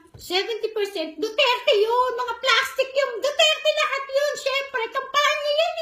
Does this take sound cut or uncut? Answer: uncut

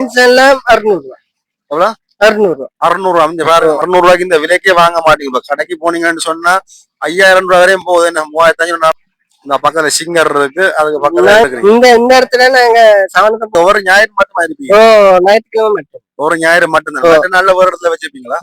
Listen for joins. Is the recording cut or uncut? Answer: cut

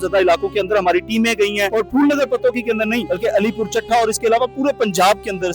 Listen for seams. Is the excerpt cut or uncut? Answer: cut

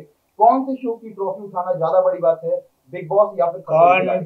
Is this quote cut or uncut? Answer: uncut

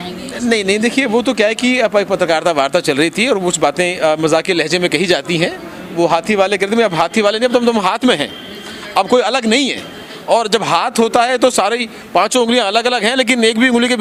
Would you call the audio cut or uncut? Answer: uncut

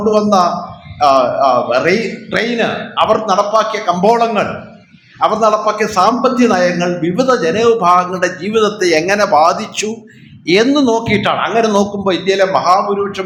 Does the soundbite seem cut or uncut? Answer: uncut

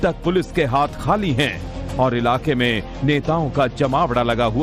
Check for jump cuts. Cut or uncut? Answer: cut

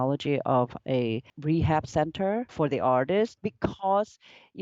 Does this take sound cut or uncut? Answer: cut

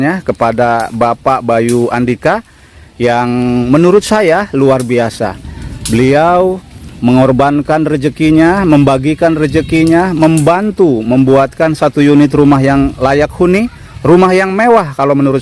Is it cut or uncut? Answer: uncut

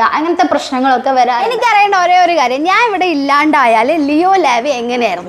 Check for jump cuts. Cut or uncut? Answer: cut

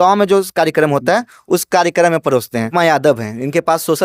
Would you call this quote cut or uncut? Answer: cut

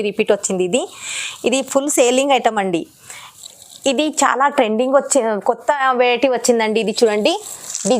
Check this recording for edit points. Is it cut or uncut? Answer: cut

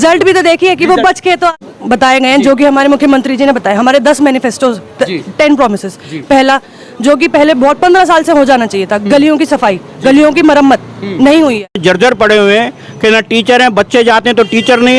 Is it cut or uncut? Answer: cut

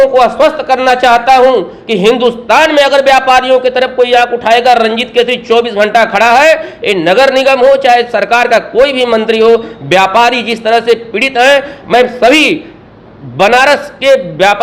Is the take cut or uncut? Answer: uncut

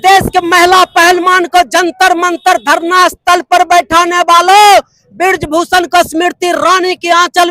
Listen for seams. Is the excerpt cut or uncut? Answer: uncut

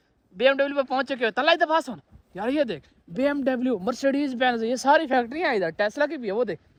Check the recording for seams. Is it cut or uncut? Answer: uncut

